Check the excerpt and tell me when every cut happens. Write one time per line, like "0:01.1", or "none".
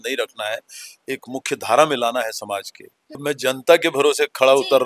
0:03.2